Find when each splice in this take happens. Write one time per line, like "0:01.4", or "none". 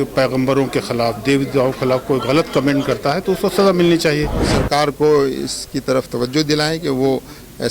0:04.5